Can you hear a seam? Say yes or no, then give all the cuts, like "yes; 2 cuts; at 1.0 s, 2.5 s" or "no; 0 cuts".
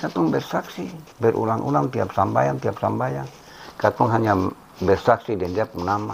no; 0 cuts